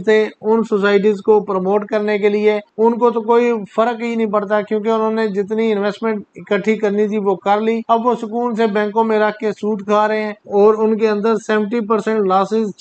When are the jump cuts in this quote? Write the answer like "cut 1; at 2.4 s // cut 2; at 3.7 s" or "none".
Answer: cut 1; at 2.7 s // cut 2; at 7.8 s // cut 3; at 10.4 s